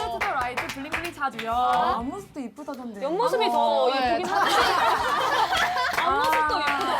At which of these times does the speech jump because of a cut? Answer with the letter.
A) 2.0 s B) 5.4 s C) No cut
A